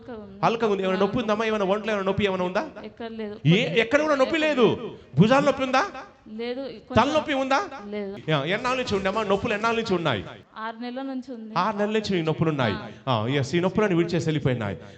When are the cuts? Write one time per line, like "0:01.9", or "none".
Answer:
0:08.2
0:10.4